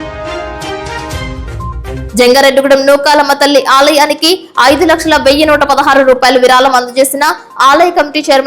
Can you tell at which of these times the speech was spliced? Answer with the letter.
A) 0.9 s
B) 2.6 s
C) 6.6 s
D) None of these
A